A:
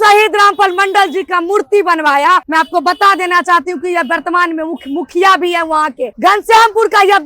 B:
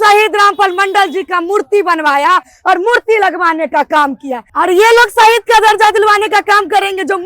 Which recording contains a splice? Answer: A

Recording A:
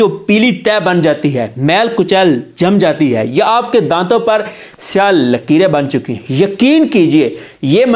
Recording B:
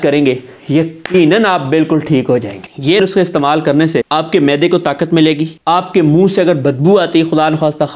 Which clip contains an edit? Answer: B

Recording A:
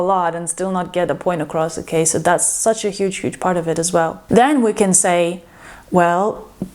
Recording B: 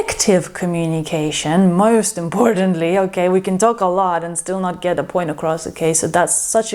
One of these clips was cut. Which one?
A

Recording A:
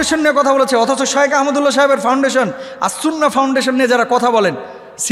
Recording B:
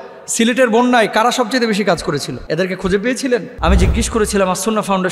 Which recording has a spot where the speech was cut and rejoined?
B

